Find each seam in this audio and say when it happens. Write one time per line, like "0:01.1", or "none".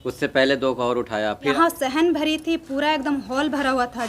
0:01.5

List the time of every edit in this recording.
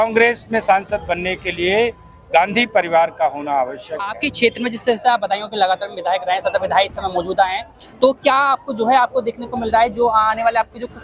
0:04.2

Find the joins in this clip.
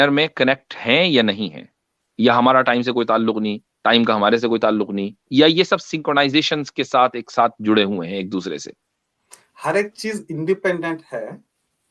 none

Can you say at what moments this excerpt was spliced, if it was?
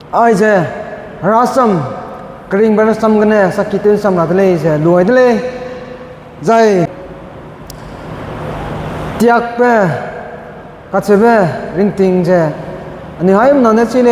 0:07.1

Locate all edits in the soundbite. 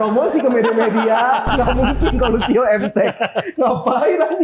none

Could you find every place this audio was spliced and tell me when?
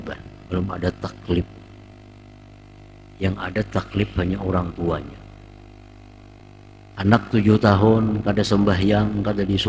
0:06.4

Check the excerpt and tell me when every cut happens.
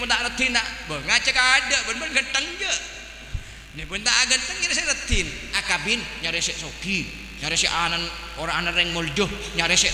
0:05.6

